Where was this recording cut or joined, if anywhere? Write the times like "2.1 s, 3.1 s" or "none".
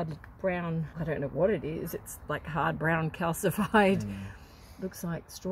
0.9 s